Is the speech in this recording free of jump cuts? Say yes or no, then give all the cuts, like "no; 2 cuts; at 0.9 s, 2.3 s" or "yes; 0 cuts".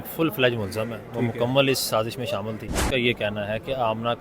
no; 1 cut; at 2.7 s